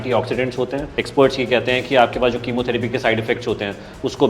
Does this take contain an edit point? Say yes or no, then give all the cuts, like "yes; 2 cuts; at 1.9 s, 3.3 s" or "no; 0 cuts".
yes; 1 cut; at 0.9 s